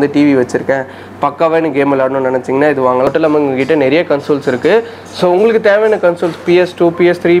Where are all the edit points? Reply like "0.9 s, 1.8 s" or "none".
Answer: 3.1 s